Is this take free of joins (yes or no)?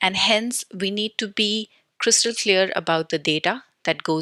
yes